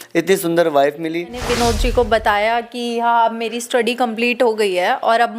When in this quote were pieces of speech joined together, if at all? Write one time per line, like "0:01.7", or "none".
0:01.4

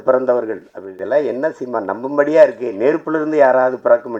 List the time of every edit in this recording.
0:01.0

